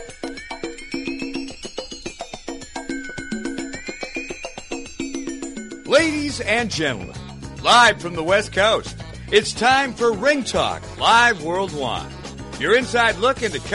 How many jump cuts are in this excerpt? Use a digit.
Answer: 1